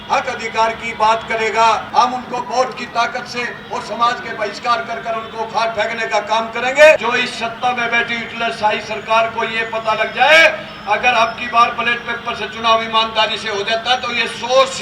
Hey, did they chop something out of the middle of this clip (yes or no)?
yes